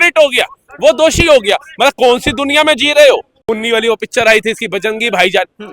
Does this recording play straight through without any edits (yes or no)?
no